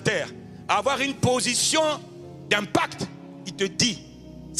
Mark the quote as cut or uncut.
uncut